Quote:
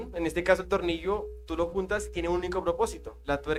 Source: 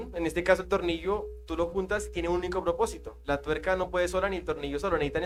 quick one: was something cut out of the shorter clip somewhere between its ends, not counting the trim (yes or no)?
no